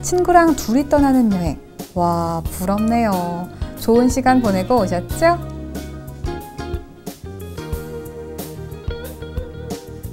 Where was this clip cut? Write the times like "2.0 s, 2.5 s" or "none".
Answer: 5.4 s